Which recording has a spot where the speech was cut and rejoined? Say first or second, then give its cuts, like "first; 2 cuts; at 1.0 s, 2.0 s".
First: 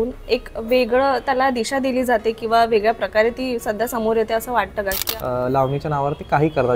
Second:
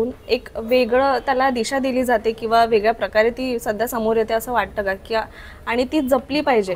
first; 1 cut; at 5.0 s